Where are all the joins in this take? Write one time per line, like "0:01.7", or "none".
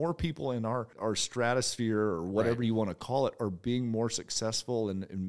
0:00.9